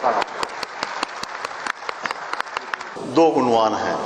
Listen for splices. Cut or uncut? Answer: cut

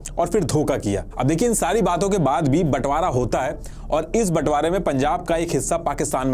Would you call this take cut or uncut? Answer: uncut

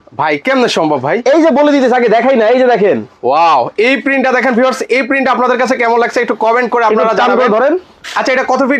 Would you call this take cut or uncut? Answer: uncut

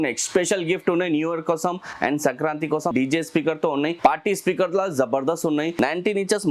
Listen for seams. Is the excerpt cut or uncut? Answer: cut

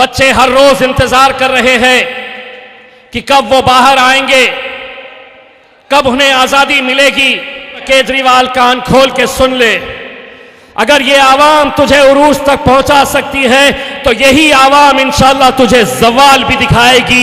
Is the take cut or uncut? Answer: cut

